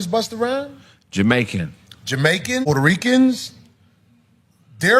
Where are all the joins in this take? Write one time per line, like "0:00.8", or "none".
0:02.6